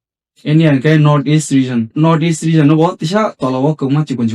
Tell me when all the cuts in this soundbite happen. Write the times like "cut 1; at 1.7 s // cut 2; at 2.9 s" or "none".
cut 1; at 1.9 s